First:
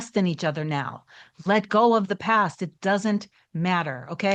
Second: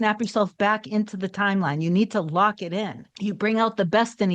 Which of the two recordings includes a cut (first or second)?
second